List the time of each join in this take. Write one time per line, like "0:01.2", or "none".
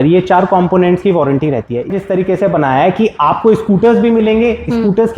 0:01.9